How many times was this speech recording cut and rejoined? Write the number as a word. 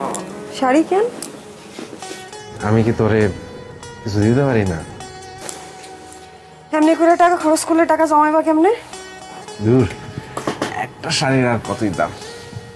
zero